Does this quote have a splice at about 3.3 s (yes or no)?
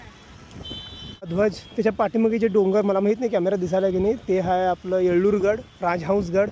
no